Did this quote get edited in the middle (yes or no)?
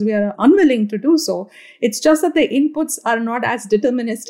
no